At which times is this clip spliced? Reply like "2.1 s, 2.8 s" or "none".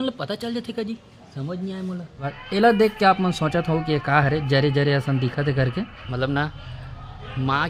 2.4 s, 6.0 s